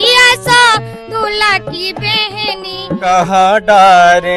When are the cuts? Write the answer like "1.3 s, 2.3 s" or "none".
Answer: 3.0 s